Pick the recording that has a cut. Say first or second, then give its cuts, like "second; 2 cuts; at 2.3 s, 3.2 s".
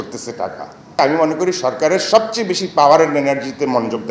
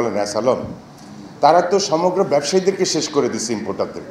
first; 1 cut; at 1.0 s